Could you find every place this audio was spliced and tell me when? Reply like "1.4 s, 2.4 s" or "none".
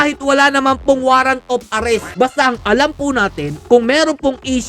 2.1 s